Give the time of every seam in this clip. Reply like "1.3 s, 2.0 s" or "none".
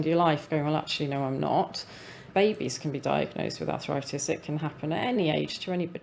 2.2 s, 5.2 s